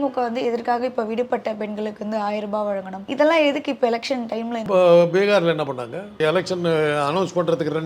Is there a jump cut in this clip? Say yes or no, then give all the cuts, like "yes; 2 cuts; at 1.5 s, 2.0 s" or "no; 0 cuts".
yes; 3 cuts; at 3.0 s, 4.6 s, 6.2 s